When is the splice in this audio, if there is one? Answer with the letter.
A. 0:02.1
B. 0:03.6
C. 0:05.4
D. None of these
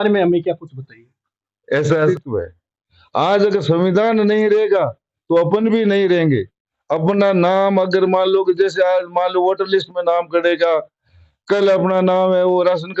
A